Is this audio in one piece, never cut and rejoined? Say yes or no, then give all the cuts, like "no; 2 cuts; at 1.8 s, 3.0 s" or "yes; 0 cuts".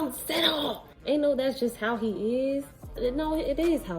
no; 2 cuts; at 0.9 s, 2.9 s